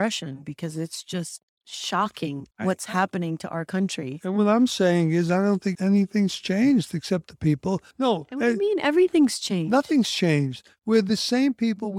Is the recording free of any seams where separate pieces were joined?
no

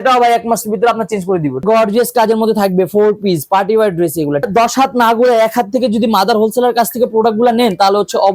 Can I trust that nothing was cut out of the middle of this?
no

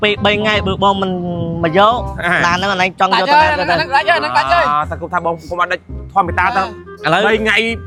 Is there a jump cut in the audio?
no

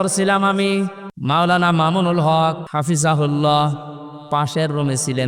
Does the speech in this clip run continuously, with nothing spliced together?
no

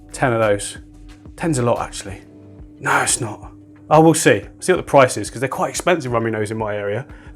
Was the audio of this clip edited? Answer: no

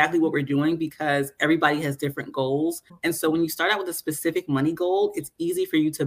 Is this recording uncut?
no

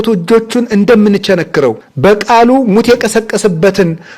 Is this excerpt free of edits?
no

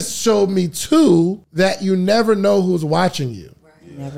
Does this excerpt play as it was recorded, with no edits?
no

